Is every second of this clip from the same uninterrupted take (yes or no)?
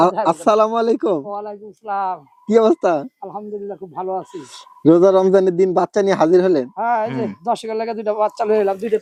yes